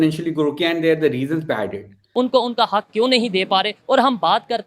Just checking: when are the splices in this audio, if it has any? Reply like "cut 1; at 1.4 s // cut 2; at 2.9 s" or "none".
cut 1; at 2.0 s